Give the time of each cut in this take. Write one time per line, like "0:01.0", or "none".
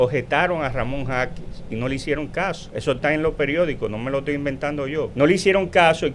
0:02.6
0:05.1